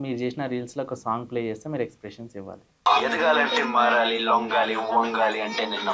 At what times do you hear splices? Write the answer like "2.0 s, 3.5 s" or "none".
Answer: 2.9 s